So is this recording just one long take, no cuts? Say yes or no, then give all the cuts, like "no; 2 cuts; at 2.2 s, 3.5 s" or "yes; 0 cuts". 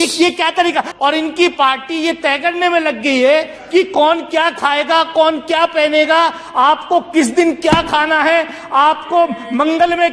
no; 1 cut; at 0.9 s